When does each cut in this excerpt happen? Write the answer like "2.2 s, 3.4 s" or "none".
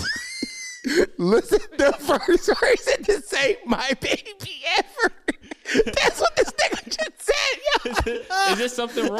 1.7 s

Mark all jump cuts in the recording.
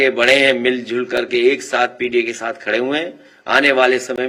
none

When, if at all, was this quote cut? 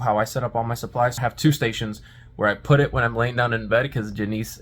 1.2 s

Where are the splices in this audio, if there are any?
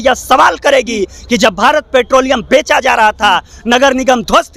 none

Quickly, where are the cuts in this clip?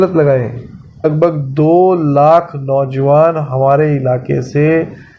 1.0 s

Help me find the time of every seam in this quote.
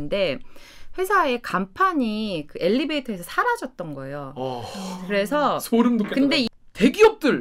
6.5 s

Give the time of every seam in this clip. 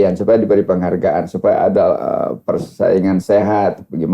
none

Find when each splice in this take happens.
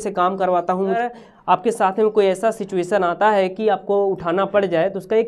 1.0 s

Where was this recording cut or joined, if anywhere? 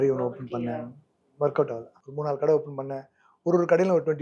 none

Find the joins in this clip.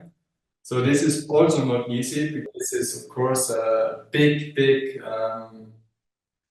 2.5 s

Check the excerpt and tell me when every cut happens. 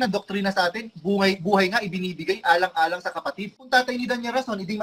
3.7 s

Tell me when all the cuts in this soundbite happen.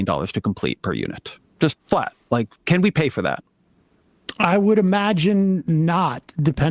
1.8 s, 5.2 s

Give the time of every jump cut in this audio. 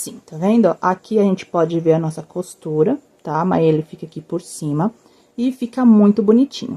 none

